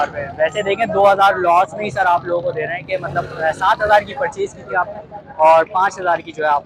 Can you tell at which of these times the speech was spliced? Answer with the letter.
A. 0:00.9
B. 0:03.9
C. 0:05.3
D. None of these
D